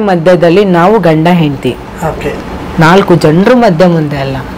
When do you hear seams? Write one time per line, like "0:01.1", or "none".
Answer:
none

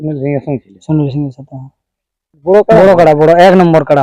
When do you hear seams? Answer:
0:02.4

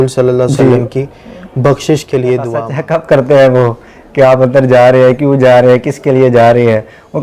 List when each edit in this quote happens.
0:02.7

